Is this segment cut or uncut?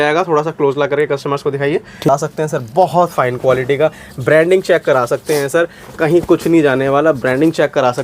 cut